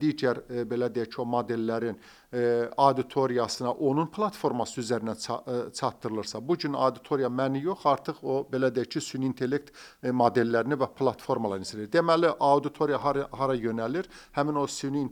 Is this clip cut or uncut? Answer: uncut